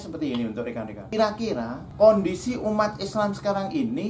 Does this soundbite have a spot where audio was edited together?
yes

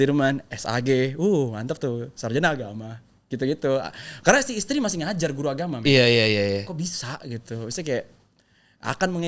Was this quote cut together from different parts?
no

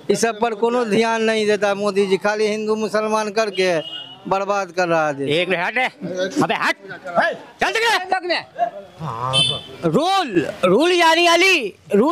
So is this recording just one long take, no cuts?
yes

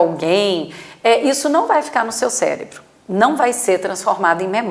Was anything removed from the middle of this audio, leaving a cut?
no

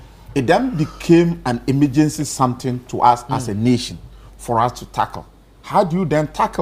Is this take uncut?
yes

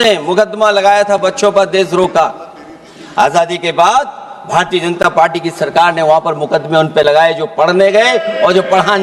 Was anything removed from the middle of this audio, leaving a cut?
no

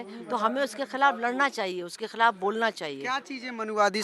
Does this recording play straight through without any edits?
yes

